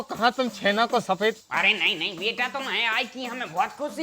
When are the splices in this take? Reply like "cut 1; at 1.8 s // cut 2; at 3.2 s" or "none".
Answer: cut 1; at 1.4 s